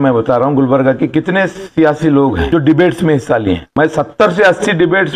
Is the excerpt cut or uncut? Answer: cut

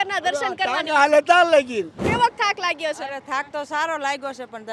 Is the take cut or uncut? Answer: cut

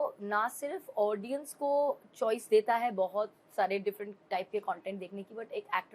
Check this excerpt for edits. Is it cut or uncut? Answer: uncut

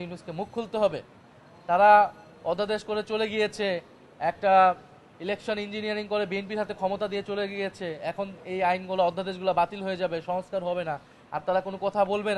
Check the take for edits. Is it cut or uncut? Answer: uncut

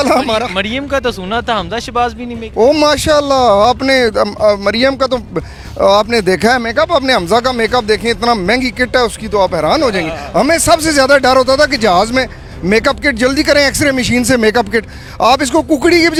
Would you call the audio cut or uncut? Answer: uncut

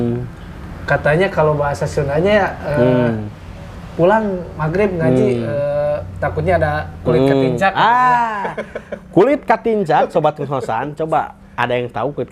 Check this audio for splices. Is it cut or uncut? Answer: uncut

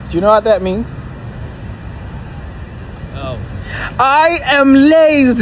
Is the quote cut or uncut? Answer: uncut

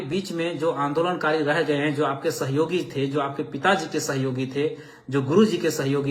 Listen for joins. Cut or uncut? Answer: uncut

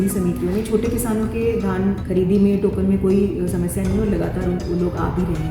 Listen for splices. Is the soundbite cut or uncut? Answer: cut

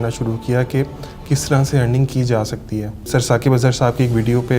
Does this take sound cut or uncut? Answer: cut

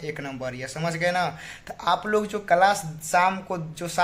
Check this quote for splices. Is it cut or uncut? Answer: uncut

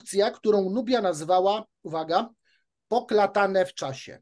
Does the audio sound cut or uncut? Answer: uncut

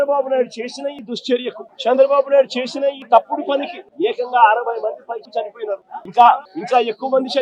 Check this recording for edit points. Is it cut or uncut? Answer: uncut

